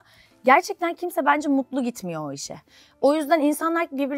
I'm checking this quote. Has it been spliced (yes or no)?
no